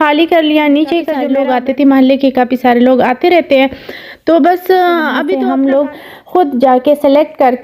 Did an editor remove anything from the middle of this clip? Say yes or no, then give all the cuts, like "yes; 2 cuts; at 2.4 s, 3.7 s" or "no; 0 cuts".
yes; 2 cuts; at 1.3 s, 5.3 s